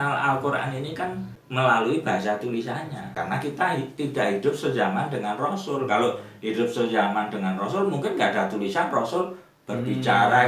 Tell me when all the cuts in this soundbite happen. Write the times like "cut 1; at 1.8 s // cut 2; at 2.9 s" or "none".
cut 1; at 1.4 s // cut 2; at 3.0 s